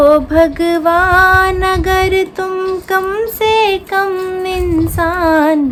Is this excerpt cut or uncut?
uncut